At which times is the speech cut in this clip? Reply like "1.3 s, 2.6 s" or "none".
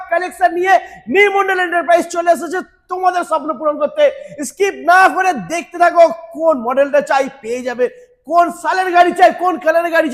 none